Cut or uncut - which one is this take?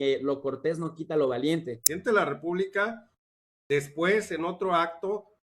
cut